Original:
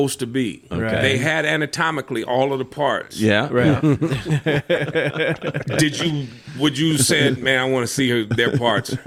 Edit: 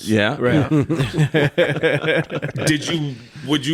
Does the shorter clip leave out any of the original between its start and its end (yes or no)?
no